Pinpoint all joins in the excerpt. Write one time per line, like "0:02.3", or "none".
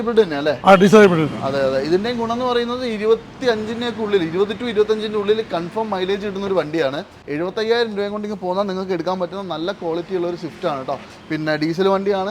0:07.1